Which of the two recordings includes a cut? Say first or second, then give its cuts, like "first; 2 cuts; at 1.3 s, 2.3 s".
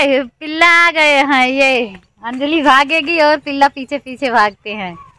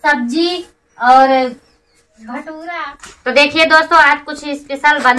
second; 1 cut; at 3.0 s